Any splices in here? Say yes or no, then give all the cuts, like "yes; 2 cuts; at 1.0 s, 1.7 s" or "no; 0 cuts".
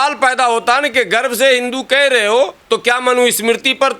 yes; 1 cut; at 2.6 s